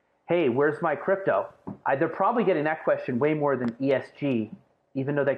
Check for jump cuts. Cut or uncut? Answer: uncut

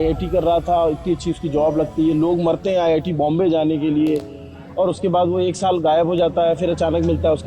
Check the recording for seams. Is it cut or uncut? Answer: uncut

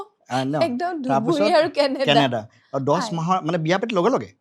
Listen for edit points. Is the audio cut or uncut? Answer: uncut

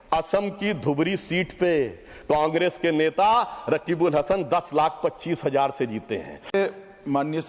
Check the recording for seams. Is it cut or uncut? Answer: cut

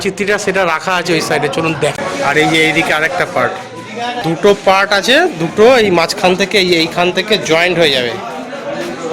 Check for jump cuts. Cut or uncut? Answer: cut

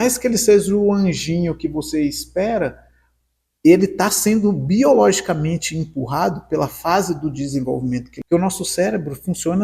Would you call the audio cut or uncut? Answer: cut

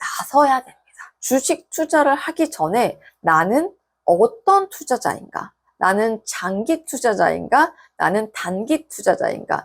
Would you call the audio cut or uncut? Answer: uncut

